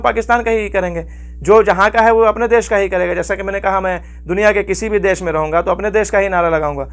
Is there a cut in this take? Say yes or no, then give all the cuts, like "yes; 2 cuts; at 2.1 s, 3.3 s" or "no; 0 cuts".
no; 0 cuts